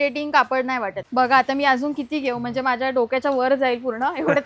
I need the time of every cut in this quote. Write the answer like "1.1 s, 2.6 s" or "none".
1.0 s